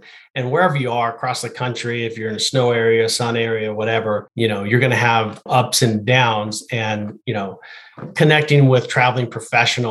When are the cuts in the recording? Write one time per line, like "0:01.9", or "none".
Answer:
0:04.3
0:05.4